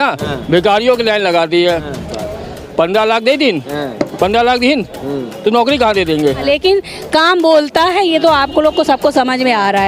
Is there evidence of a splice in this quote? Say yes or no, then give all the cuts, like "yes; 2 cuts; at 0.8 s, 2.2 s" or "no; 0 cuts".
yes; 2 cuts; at 2.1 s, 6.4 s